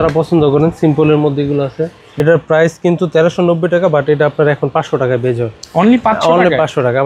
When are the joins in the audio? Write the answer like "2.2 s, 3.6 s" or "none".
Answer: 2.0 s